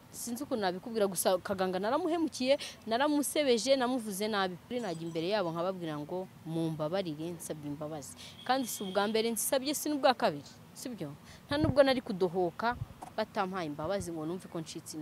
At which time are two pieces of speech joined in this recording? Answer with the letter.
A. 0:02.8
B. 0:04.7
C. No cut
B